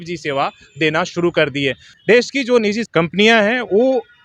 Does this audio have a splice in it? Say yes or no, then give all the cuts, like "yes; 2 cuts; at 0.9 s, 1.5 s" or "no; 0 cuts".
yes; 2 cuts; at 1.9 s, 2.8 s